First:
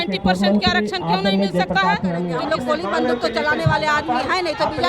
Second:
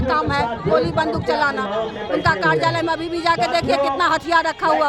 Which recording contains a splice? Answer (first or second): first